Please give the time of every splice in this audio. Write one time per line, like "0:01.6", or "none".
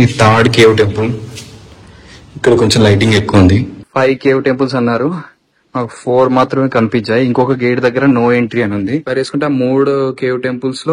0:03.8
0:09.1